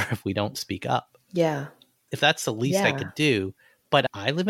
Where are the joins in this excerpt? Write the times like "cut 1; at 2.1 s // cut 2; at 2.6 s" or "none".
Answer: none

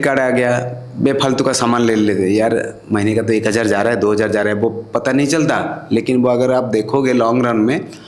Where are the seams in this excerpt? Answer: none

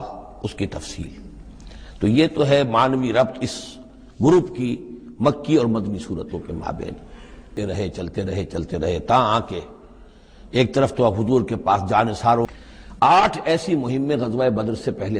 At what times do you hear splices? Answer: cut 1; at 7.5 s // cut 2; at 12.5 s

